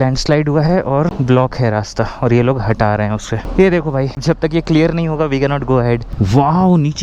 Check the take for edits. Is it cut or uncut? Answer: cut